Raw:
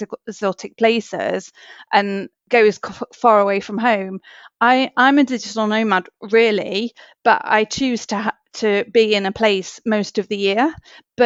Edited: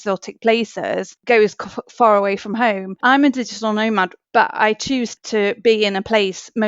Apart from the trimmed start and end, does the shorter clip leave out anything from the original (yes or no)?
yes